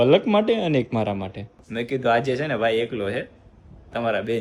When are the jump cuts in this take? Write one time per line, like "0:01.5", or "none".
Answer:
none